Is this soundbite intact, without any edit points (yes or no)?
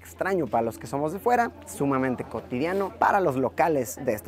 yes